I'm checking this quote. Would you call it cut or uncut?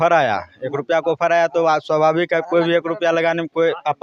uncut